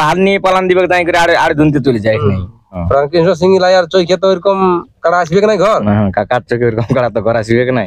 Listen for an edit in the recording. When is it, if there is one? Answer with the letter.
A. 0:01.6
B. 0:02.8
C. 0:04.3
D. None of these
B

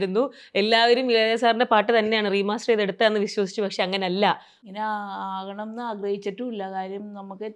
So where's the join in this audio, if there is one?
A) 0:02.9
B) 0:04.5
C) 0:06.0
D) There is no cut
B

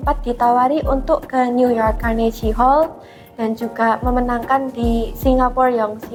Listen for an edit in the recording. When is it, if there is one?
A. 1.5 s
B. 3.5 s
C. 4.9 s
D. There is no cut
D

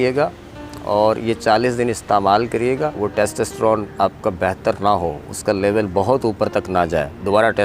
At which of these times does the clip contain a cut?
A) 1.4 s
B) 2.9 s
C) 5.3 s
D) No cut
B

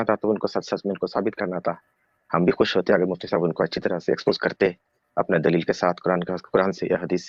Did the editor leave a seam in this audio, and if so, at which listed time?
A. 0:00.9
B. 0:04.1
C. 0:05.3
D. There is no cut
D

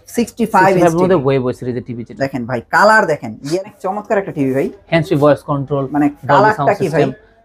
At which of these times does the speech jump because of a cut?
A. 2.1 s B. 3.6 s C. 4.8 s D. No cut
B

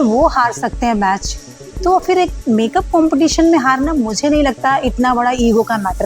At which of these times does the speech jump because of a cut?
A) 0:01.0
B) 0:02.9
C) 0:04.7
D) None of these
D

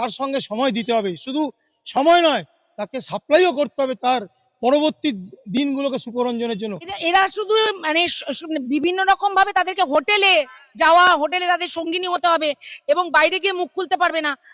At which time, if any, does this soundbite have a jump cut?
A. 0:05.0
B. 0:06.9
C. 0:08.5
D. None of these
B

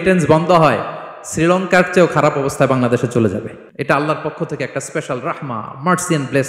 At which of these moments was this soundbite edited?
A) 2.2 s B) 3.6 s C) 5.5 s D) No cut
B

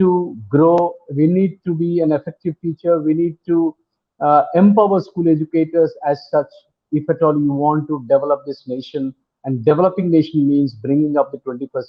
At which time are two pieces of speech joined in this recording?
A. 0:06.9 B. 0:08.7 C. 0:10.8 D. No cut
D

